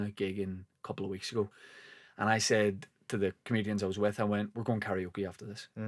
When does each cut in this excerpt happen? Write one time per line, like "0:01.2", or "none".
none